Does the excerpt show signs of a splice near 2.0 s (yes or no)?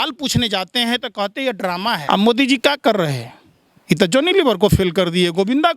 yes